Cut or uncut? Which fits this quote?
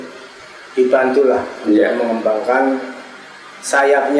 uncut